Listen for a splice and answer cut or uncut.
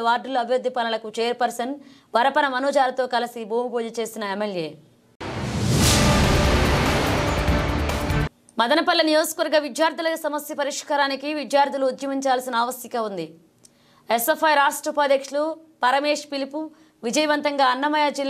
uncut